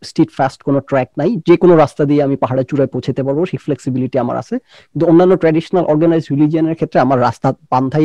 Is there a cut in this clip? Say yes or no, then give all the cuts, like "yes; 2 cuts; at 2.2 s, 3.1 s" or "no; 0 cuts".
no; 0 cuts